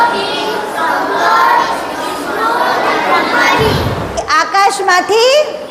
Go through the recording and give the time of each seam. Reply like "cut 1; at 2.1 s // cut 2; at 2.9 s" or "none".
cut 1; at 4.2 s